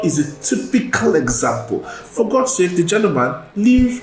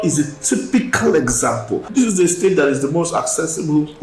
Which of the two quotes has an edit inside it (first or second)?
second